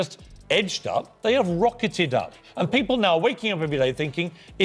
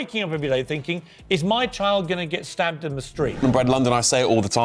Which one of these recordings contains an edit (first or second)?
second